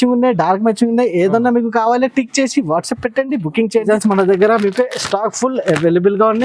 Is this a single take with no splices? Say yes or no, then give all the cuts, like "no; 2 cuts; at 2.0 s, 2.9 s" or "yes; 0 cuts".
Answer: no; 1 cut; at 3.9 s